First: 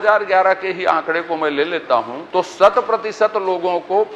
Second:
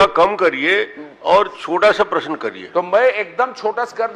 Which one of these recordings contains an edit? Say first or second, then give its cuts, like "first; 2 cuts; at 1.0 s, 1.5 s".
first; 1 cut; at 2.2 s